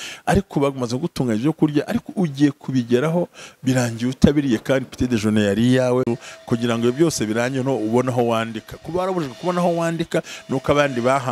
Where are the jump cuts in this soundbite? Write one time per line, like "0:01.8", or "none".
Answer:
0:06.2